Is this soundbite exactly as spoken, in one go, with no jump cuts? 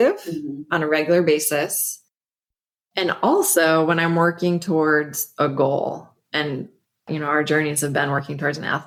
yes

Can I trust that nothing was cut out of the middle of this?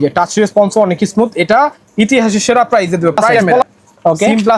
no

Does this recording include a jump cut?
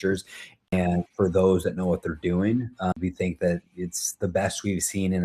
yes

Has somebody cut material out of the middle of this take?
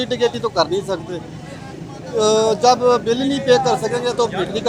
no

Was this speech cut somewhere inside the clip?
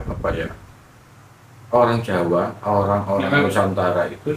no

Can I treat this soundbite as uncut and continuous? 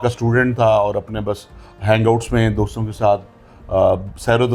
yes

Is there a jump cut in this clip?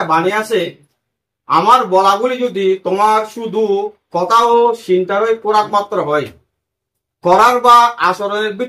no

